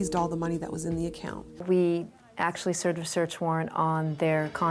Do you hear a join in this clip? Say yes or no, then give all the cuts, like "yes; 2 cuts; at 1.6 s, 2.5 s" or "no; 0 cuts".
yes; 1 cut; at 1.5 s